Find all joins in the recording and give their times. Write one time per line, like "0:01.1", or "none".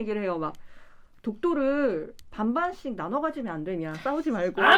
none